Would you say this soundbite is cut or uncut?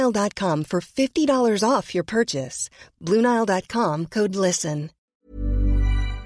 cut